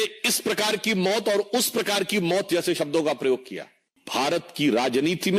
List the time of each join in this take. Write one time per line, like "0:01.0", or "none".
0:04.0